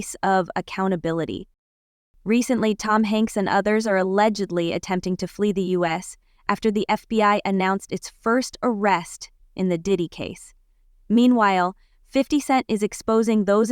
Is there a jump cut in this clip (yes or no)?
yes